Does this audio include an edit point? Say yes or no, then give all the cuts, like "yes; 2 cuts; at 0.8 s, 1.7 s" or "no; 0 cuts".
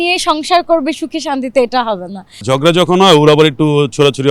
yes; 1 cut; at 2.4 s